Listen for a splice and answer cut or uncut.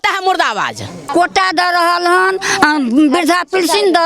cut